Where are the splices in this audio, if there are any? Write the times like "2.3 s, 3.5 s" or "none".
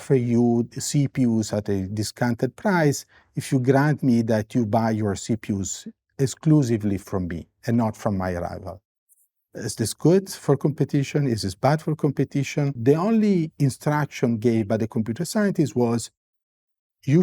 12.8 s